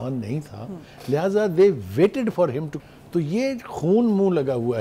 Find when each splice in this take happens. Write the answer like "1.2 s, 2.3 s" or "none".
2.7 s